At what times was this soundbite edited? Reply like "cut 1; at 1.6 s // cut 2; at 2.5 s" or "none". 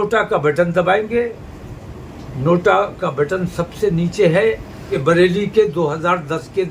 cut 1; at 4.8 s